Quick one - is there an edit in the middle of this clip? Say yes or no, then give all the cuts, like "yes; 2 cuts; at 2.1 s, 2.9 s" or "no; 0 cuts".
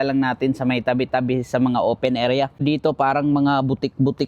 yes; 1 cut; at 2.6 s